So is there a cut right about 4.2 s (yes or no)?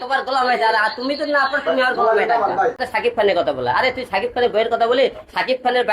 no